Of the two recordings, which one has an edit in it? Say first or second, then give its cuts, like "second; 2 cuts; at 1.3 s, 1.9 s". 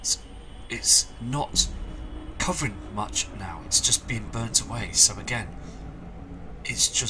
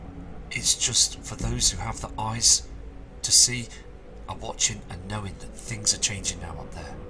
second; 1 cut; at 4.3 s